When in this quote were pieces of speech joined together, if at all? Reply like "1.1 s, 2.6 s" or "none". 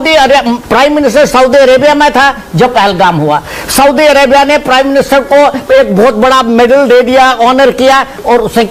none